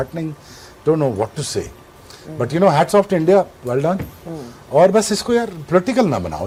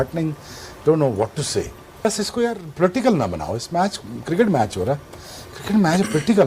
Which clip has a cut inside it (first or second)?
second